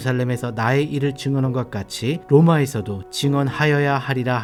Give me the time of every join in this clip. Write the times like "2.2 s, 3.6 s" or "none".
none